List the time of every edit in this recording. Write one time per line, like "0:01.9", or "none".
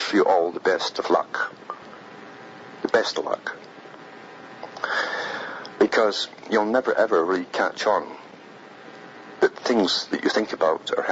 0:05.4